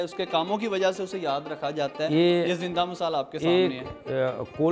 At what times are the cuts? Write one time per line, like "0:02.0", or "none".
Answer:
none